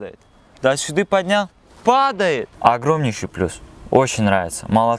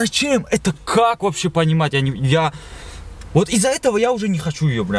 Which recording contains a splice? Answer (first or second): first